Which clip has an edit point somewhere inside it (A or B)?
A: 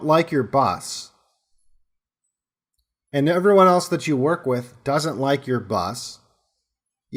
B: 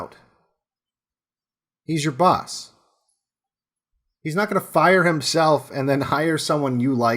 B